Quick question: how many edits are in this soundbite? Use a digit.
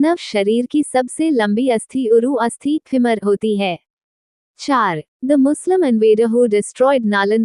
1